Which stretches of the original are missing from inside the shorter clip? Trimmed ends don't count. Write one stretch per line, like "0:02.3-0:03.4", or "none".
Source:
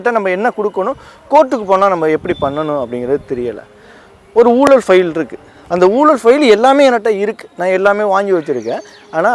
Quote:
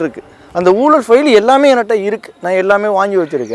none